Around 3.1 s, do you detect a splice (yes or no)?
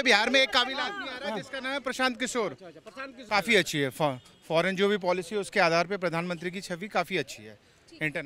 yes